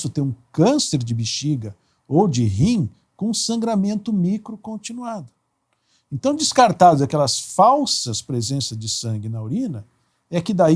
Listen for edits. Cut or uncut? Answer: uncut